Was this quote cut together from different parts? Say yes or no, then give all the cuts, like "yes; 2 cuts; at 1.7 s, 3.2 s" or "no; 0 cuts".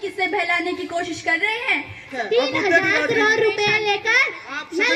yes; 1 cut; at 2.1 s